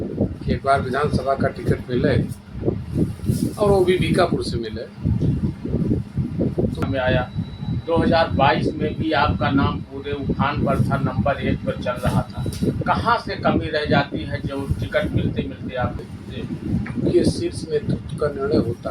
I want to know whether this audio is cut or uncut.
cut